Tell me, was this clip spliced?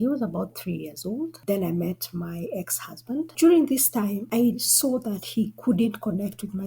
yes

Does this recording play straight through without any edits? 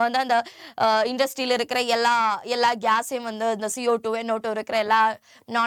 yes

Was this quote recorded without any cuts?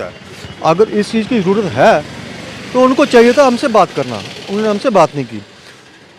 yes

